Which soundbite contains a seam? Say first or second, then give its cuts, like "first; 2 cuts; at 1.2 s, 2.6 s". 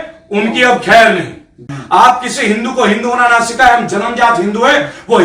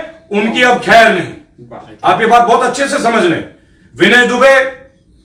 first; 1 cut; at 1.7 s